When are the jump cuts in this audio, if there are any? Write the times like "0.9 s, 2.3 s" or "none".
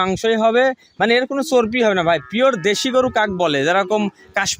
none

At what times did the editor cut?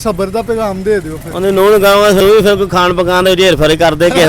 2.2 s

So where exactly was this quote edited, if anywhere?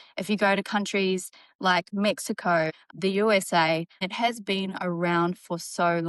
2.8 s, 4.0 s

